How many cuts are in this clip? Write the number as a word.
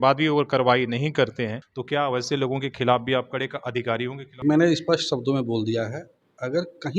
two